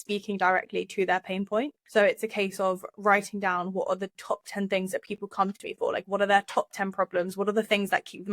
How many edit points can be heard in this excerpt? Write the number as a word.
one